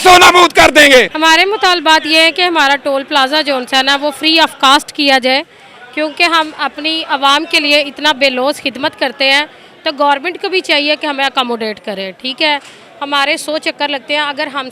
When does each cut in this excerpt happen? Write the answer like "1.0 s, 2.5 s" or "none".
none